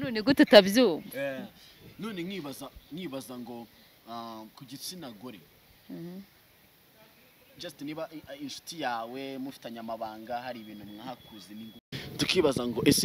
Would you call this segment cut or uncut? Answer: uncut